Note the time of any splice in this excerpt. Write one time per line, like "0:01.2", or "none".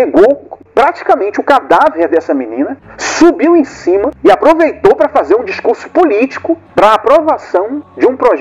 none